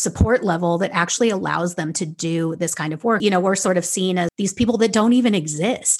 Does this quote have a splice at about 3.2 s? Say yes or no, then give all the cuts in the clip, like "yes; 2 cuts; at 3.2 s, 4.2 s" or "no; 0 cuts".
yes; 2 cuts; at 3.2 s, 4.3 s